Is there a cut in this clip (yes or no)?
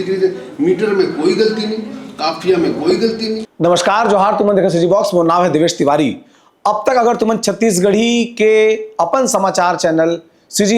yes